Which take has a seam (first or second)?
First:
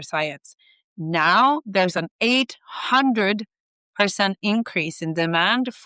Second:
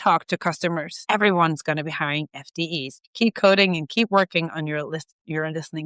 second